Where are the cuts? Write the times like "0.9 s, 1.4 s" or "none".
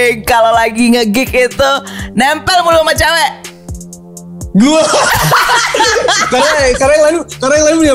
none